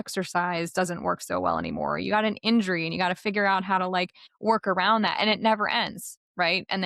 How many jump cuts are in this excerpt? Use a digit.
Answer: 1